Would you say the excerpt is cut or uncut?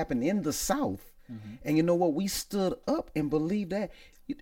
uncut